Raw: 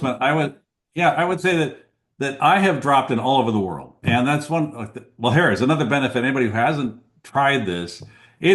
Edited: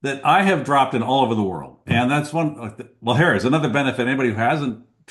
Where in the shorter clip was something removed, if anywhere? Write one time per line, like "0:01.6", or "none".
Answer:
none